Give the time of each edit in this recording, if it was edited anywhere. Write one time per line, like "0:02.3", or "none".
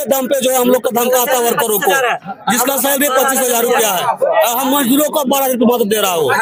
none